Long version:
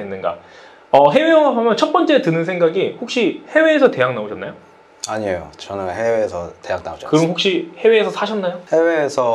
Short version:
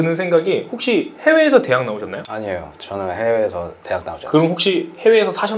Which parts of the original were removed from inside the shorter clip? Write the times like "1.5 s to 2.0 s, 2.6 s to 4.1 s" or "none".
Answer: 4.5 s to 5.0 s